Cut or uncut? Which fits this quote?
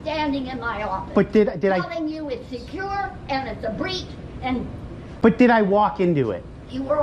uncut